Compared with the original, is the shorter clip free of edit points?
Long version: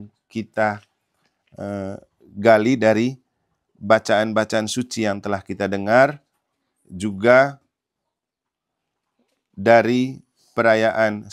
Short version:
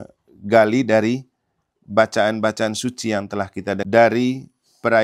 no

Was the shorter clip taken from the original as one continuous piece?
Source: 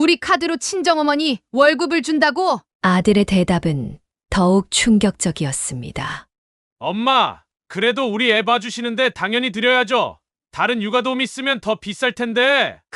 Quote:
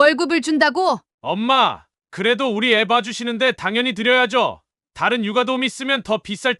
no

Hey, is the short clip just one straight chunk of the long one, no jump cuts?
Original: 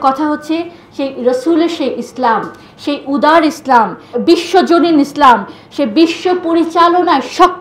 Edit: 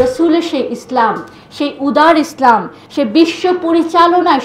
no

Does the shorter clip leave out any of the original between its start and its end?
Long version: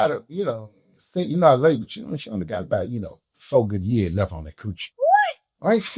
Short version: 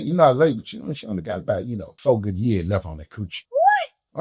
yes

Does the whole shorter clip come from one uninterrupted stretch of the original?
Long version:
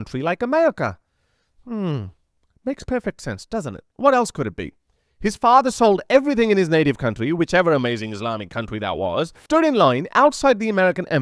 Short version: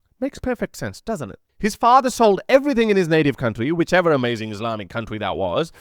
no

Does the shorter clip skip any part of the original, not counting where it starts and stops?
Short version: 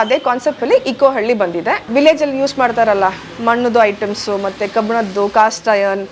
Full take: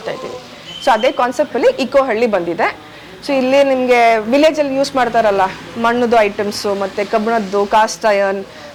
yes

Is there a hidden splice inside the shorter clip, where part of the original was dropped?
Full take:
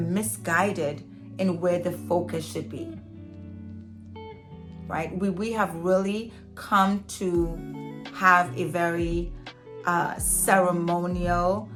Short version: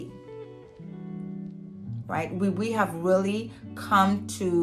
no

